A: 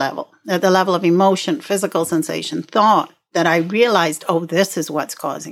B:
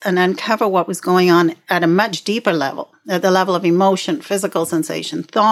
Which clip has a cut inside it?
B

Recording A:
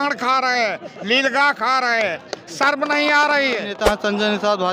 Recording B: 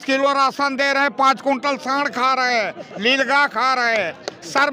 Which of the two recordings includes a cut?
A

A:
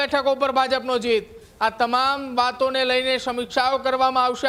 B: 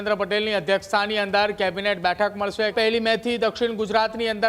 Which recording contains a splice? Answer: B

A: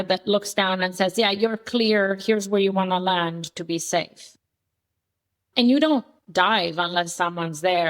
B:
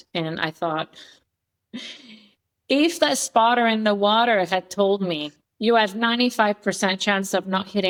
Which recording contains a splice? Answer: A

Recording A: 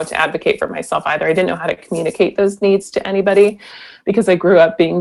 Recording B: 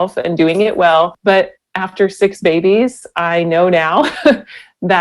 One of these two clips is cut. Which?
B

